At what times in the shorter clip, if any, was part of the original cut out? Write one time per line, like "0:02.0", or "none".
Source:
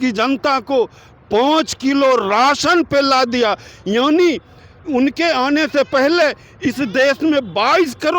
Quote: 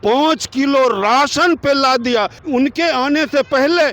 0:02.4

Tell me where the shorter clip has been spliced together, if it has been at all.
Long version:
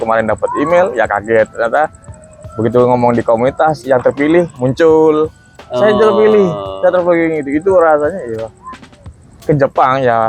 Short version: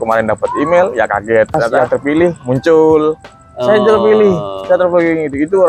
0:01.7

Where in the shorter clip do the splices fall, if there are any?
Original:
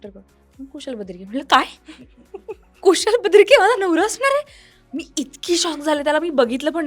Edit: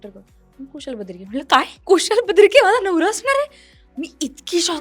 0:01.8

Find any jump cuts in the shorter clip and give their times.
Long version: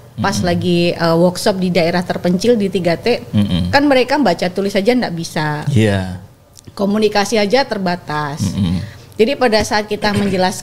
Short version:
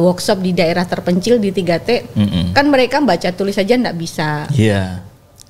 none

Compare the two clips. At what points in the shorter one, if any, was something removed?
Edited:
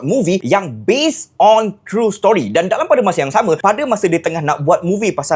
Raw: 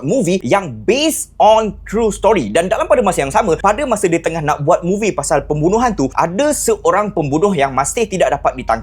none

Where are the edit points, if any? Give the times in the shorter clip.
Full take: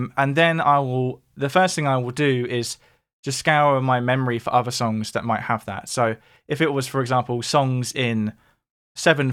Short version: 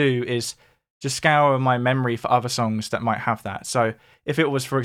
none

